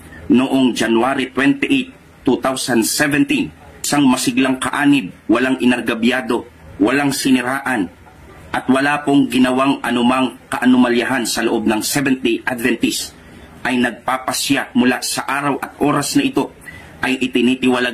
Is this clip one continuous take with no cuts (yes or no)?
yes